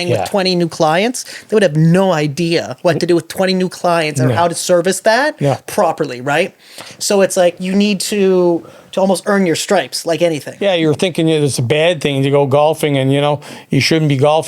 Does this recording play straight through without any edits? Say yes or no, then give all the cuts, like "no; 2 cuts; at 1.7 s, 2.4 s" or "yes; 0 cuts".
no; 1 cut; at 10.5 s